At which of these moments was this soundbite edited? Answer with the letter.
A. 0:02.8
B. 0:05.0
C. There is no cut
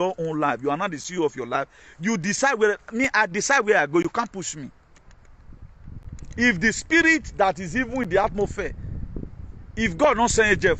C